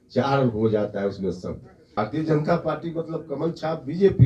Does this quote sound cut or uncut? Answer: cut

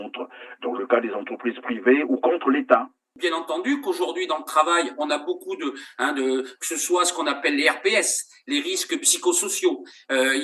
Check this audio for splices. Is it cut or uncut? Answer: cut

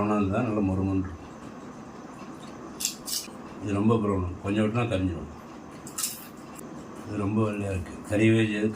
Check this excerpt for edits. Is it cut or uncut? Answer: cut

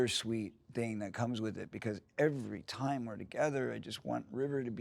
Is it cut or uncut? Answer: uncut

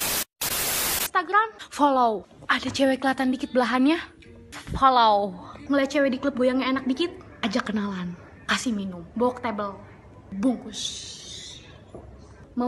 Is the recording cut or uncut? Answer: cut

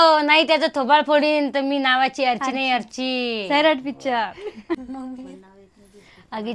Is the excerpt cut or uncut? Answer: cut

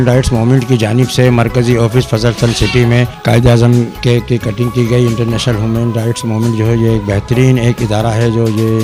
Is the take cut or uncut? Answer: uncut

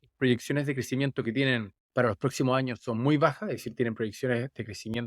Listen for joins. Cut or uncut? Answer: cut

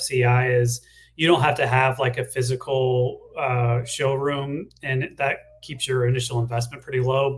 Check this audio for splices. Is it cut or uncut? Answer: uncut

